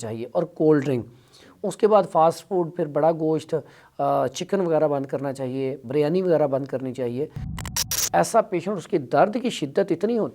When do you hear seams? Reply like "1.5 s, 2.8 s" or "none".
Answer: 7.8 s